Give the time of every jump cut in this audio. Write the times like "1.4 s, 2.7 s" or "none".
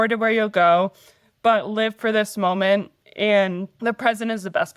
3.7 s